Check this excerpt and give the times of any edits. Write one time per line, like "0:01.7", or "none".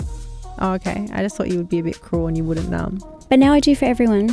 0:03.0

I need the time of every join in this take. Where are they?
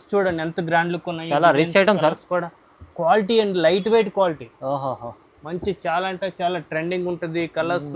none

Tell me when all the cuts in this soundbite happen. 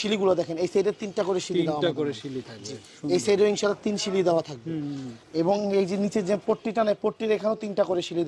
none

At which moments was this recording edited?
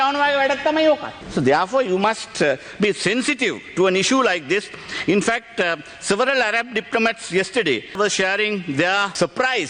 none

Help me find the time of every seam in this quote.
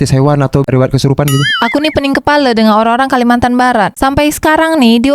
0:01.5

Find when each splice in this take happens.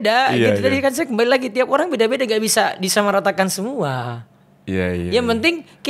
none

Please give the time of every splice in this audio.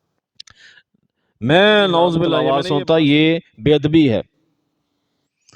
0:02.4

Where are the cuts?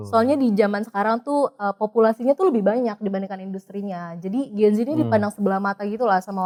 none

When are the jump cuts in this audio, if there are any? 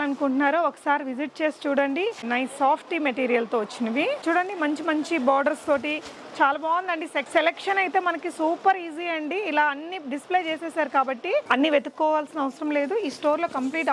0:02.2
0:04.2
0:07.2
0:11.5

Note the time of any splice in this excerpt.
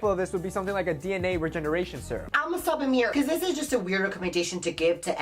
0:02.3

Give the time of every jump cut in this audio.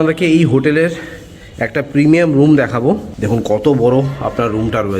0:03.1

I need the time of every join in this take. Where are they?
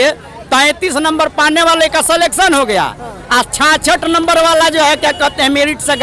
none

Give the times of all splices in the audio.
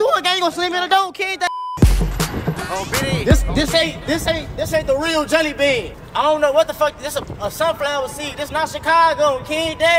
0:01.5
0:06.0

